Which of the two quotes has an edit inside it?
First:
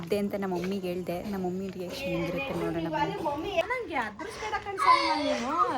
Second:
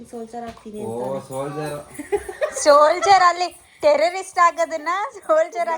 first; 1 cut; at 3.6 s

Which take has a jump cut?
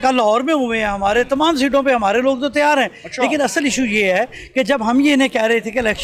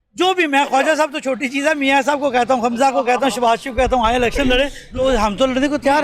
second; 1 cut; at 4.9 s

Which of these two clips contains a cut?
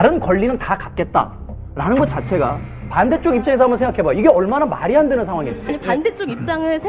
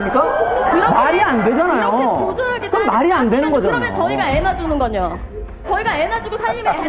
second; 1 cut; at 4.9 s

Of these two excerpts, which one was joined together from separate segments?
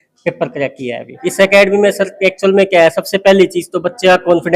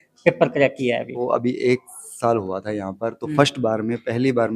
second; 1 cut; at 1.2 s

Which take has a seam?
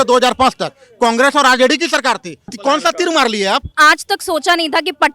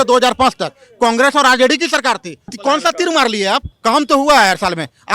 second; 1 cut; at 3.7 s

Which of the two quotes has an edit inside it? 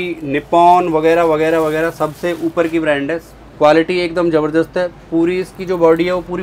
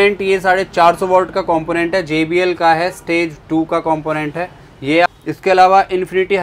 second; 1 cut; at 5.1 s

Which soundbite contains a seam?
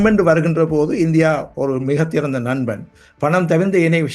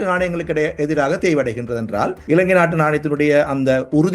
second; 1 cut; at 2.2 s

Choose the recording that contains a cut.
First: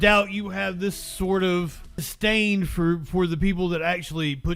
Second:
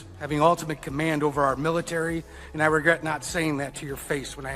first; 1 cut; at 2.1 s

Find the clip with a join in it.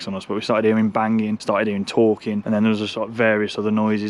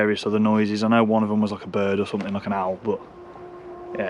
first; 2 cuts; at 1.4 s, 2.4 s

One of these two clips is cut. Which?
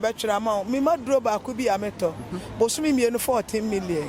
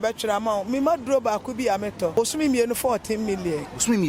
second; 1 cut; at 2.1 s

